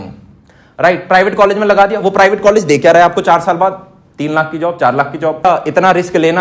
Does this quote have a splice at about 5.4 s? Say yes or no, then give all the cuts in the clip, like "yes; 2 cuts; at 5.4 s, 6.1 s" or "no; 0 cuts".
yes; 1 cut; at 5.4 s